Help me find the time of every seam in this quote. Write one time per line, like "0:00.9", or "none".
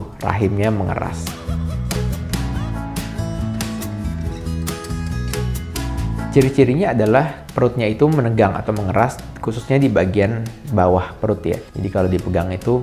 none